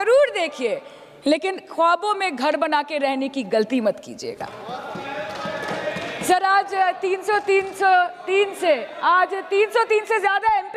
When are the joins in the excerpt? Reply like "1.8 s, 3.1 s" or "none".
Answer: none